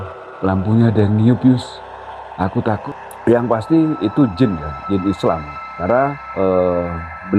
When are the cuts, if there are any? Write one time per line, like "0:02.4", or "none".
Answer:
0:02.8